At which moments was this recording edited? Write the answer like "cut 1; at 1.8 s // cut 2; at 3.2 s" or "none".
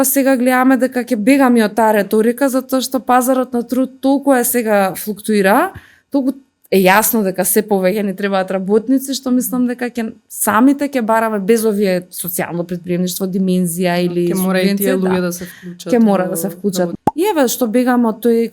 cut 1; at 17.0 s